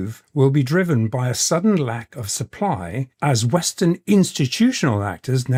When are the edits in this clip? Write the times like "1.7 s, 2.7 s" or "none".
none